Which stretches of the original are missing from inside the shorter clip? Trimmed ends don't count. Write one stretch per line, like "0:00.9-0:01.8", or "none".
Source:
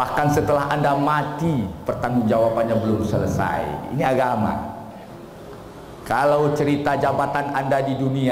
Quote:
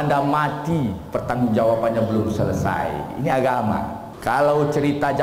0:04.8-0:05.9

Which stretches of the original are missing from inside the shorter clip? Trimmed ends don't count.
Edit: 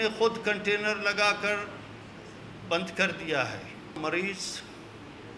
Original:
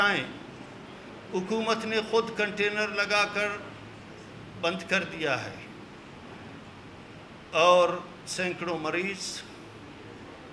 0:05.9-0:08.8

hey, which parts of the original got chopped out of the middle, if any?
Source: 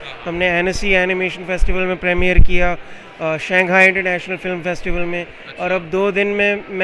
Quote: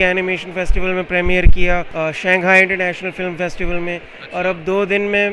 0:02.8-0:03.1

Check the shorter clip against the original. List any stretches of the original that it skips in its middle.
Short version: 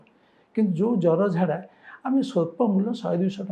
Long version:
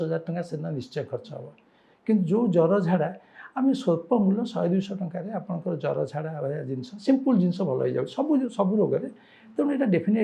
none

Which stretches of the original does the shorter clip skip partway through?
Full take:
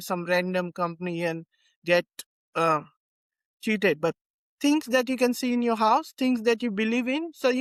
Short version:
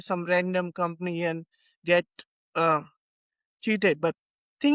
none

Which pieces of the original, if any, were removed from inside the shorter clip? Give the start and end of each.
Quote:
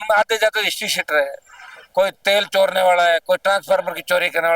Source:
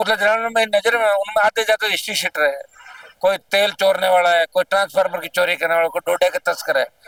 none

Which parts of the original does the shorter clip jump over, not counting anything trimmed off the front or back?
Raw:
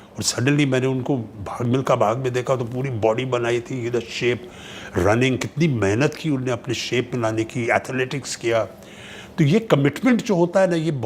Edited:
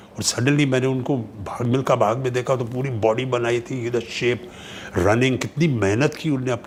none

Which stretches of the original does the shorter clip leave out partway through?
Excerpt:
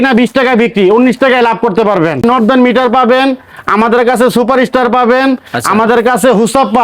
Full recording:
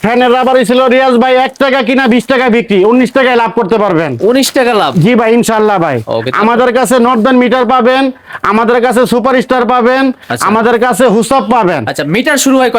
0:04.2-0:07.0

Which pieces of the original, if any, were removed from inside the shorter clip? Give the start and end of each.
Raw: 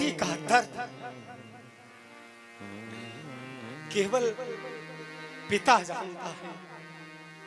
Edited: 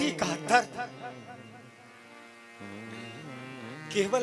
none

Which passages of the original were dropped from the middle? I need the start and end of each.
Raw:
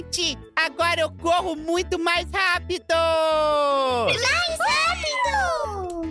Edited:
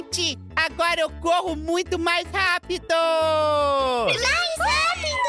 none

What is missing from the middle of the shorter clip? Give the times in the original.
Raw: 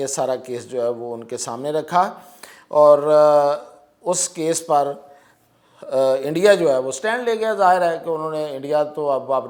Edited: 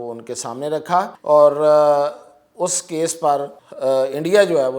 0:02.2-0:02.6
0:05.1-0:05.7

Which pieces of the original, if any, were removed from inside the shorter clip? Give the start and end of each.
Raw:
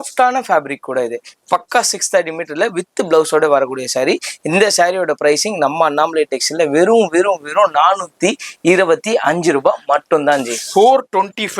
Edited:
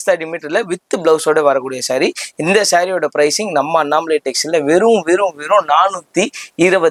none

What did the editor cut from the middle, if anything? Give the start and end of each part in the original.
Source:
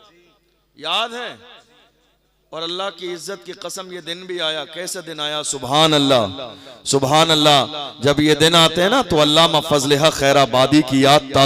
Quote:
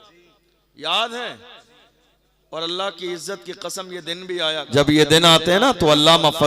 0:04.6-0:07.9

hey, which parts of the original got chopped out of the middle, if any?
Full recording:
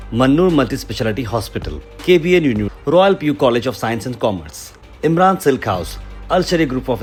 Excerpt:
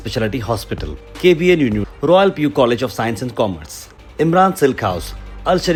none

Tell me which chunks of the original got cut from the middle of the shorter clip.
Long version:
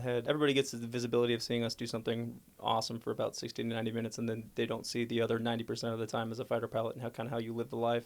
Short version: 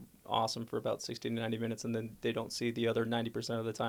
none

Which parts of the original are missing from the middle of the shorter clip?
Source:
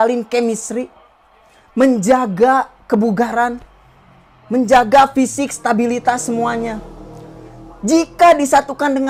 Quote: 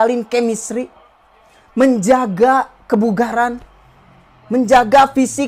none

